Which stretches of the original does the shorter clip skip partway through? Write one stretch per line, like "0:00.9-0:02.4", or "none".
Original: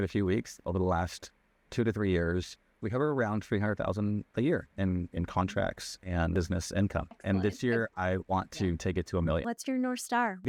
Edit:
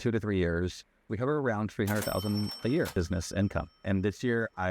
0:04.6-0:06.3